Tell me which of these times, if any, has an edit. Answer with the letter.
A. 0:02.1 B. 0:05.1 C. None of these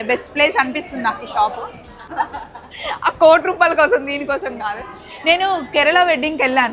A